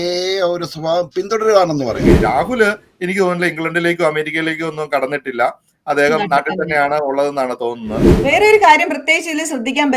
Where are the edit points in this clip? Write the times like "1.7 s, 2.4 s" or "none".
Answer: 2.1 s, 8.0 s